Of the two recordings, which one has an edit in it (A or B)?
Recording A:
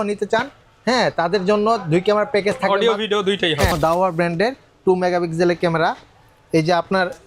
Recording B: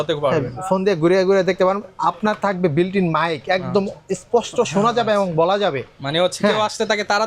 A